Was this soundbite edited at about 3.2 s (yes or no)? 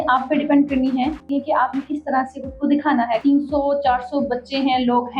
yes